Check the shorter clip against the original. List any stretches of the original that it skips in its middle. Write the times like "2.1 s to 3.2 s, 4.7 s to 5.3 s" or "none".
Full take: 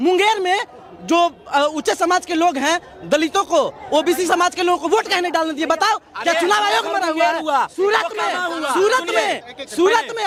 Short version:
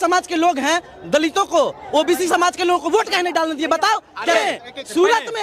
6.3 s to 9.2 s